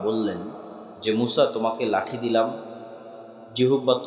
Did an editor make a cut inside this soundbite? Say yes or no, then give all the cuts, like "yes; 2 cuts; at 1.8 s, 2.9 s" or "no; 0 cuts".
no; 0 cuts